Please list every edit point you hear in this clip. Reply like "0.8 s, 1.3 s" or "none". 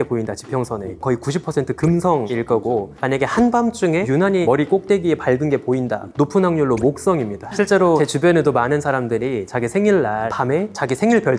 1.0 s, 2.3 s, 4.3 s, 6.1 s, 7.9 s, 10.7 s